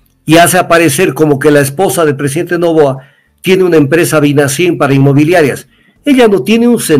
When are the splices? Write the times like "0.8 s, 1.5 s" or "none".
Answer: none